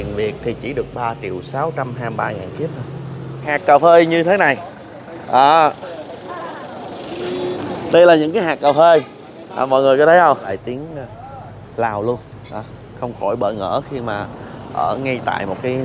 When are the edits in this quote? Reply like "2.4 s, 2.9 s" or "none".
3.5 s, 10.6 s